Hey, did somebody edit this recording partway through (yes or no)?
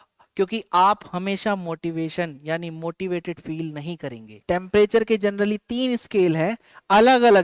yes